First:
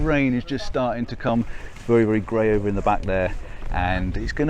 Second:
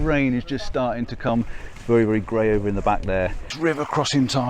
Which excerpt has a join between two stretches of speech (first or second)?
second